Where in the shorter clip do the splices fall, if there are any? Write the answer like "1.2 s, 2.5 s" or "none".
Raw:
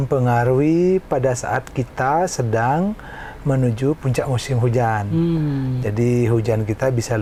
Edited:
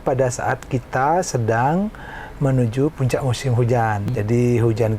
4.0 s